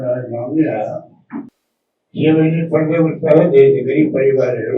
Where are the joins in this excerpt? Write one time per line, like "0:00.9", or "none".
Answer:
0:01.6